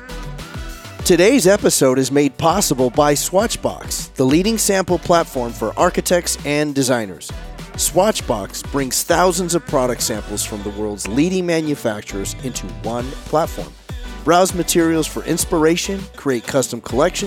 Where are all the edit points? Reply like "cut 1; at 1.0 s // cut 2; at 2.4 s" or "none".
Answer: cut 1; at 1.1 s